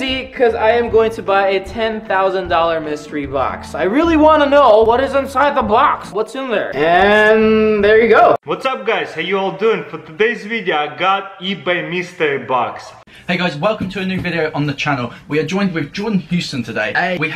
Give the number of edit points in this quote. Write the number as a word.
two